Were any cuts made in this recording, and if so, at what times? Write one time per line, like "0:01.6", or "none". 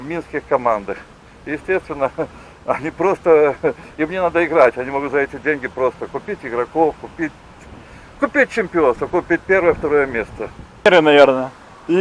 0:10.9